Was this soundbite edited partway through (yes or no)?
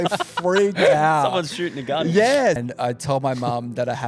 yes